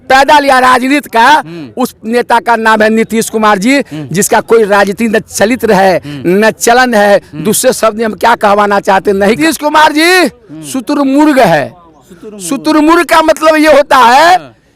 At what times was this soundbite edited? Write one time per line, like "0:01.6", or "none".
0:09.4